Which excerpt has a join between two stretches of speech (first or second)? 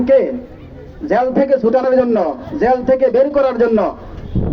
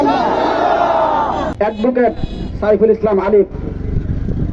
second